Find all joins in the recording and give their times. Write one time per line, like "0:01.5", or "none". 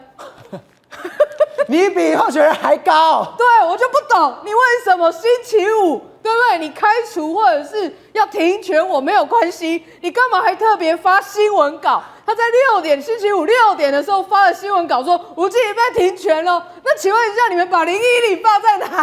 none